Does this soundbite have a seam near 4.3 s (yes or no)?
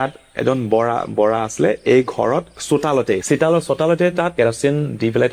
yes